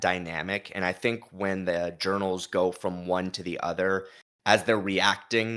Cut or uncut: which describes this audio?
uncut